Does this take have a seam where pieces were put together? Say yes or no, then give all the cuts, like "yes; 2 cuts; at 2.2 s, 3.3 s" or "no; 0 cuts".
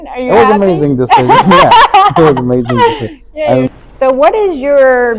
yes; 1 cut; at 3.7 s